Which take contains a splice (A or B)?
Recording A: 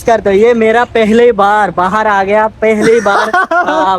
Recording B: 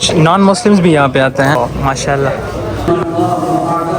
B